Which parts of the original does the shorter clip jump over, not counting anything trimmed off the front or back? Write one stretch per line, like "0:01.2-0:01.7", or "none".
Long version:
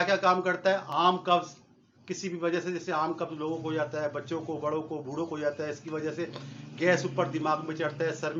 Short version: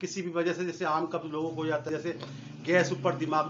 0:03.9-0:06.0